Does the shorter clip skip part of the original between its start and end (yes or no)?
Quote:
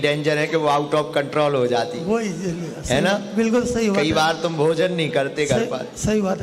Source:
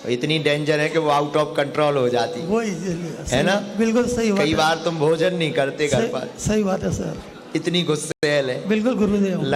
no